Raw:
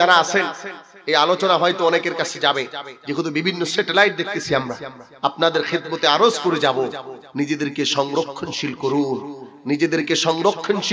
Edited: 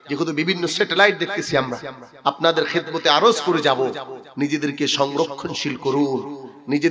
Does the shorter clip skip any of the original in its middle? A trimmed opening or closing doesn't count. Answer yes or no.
no